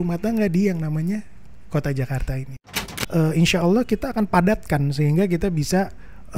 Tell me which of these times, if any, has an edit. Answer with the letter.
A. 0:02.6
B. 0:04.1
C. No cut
A